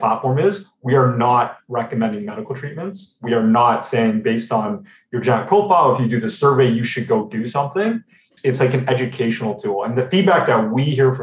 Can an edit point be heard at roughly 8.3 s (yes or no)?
yes